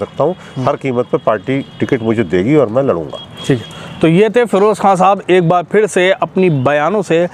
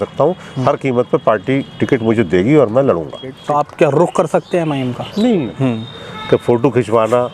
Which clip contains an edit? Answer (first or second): second